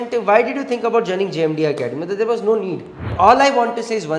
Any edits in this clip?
yes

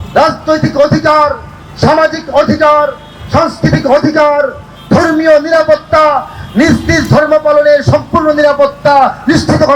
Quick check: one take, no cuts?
yes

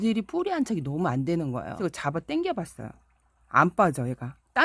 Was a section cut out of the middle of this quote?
yes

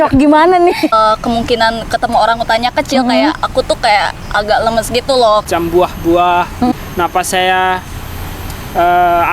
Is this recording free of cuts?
no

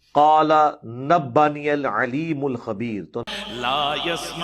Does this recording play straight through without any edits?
no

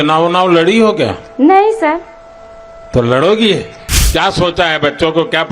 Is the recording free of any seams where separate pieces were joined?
no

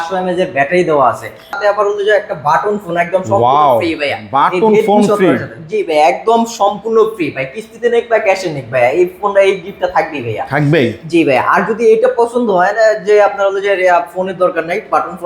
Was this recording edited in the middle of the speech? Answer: yes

